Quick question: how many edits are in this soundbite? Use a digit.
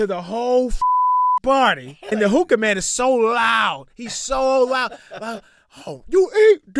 1